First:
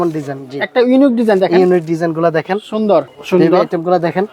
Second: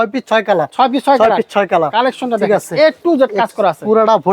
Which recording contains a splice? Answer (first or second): first